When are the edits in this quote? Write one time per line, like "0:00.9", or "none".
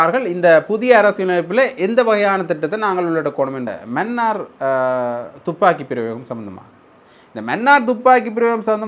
0:03.7